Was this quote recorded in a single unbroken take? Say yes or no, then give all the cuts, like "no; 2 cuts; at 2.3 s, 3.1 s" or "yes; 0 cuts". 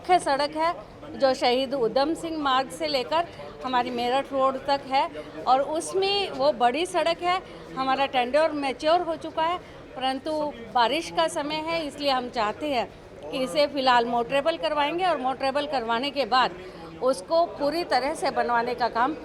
yes; 0 cuts